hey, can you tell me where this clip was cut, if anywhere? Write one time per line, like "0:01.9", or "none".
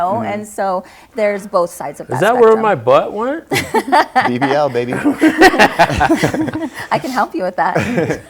none